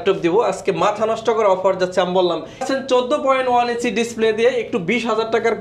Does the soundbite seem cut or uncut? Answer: cut